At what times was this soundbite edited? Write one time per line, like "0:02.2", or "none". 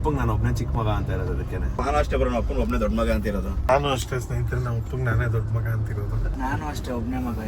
0:01.8
0:03.7
0:06.3